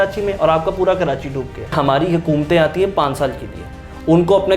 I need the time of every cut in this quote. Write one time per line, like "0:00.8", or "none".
0:01.7